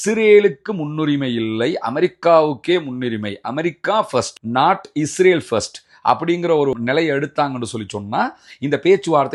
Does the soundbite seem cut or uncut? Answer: uncut